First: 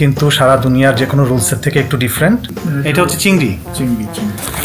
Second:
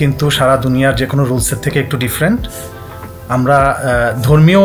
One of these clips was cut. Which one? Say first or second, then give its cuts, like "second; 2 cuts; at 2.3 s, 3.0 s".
first; 1 cut; at 2.5 s